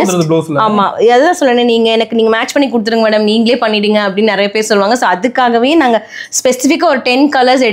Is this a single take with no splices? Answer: yes; 0 cuts

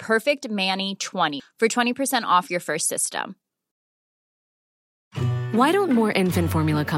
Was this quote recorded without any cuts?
yes; 0 cuts

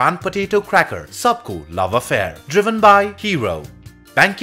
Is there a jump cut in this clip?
no; 0 cuts

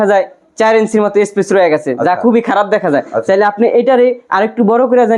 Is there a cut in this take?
no; 0 cuts

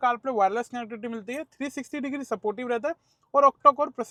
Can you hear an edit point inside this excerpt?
no; 0 cuts

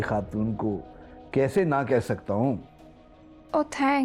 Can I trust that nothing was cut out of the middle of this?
yes; 0 cuts

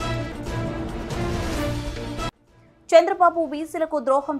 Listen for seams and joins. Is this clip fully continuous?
no; 1 cut; at 2.3 s

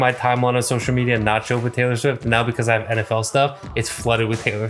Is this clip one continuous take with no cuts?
yes; 0 cuts

